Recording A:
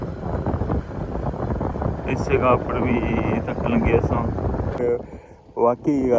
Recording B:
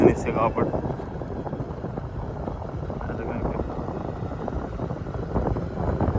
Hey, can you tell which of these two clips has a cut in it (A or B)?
A